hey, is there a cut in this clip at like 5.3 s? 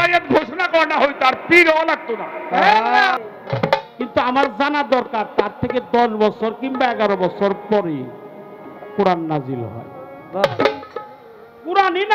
no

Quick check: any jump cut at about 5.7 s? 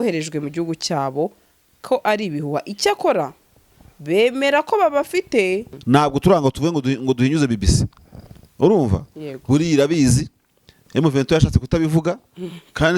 yes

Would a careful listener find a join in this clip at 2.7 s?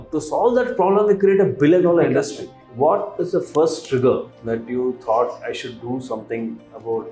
yes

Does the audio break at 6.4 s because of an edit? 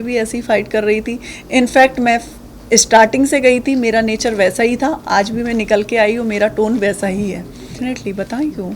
no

